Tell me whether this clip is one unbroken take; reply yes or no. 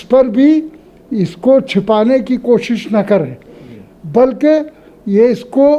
yes